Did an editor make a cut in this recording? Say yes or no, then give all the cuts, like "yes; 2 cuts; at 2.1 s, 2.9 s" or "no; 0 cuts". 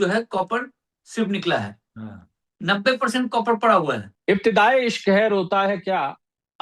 yes; 1 cut; at 4.1 s